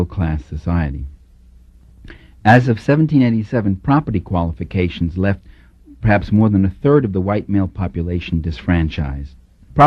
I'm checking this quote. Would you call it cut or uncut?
uncut